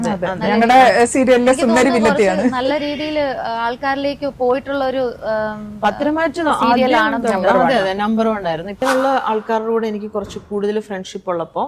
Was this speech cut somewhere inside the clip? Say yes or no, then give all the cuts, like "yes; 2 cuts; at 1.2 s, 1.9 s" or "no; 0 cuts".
yes; 1 cut; at 8.8 s